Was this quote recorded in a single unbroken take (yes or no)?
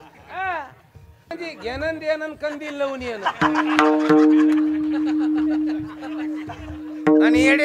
no